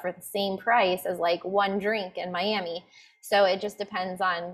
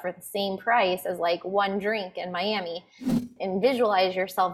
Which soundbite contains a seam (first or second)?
second